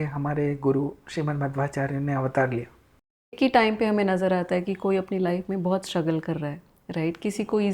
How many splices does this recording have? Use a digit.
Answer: 1